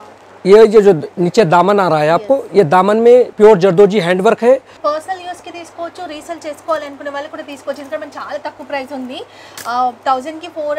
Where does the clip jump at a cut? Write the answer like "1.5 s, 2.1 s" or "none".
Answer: 3.3 s, 4.8 s